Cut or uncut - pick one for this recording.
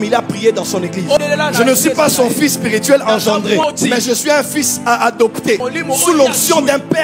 cut